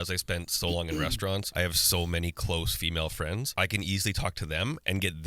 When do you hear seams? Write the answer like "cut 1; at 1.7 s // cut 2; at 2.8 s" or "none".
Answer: cut 1; at 1.5 s // cut 2; at 3.5 s